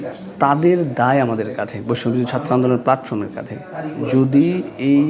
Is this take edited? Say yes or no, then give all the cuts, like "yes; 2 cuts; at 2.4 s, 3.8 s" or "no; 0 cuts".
no; 0 cuts